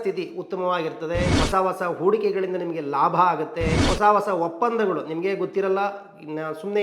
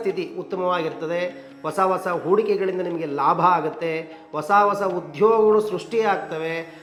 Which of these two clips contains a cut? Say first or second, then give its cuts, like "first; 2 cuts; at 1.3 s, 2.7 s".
first; 2 cuts; at 1.3 s, 3.8 s